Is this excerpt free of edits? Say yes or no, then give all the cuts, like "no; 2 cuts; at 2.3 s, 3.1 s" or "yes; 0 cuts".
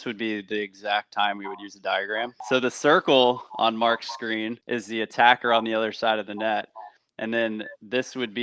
no; 1 cut; at 2.4 s